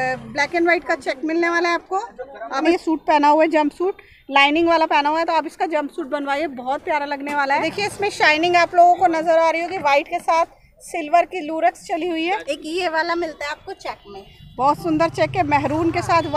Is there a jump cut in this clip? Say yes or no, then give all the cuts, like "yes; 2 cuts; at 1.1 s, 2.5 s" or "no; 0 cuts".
yes; 3 cuts; at 2.6 s, 7.6 s, 12.4 s